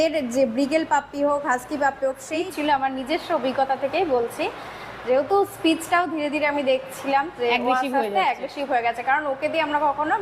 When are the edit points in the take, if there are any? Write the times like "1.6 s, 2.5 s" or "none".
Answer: 2.2 s